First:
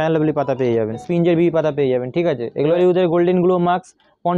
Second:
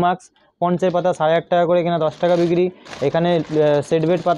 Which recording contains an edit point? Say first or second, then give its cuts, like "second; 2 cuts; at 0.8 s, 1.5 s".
first; 2 cuts; at 1.0 s, 2.7 s